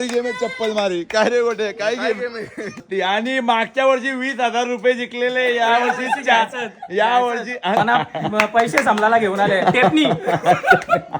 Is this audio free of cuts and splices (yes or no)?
no